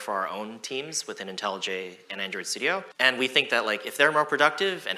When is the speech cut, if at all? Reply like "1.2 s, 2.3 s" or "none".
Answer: 2.9 s